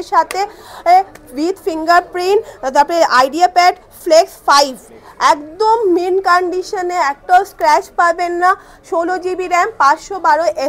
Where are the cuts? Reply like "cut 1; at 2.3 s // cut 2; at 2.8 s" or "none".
none